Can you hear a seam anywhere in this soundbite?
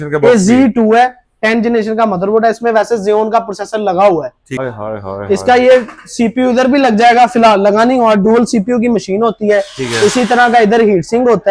yes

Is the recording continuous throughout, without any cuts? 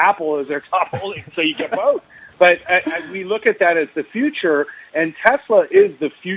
yes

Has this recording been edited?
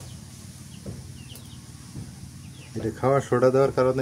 no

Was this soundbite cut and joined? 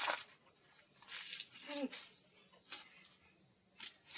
no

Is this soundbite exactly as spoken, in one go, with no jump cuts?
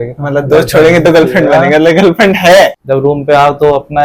no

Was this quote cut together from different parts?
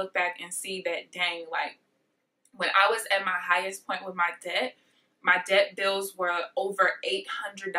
no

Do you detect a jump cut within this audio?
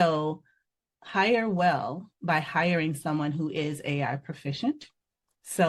no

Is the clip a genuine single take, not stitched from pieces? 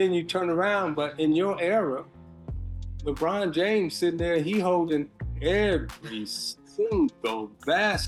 yes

